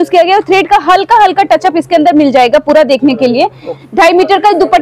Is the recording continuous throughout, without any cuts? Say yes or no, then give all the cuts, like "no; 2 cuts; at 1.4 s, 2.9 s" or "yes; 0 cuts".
no; 1 cut; at 3.7 s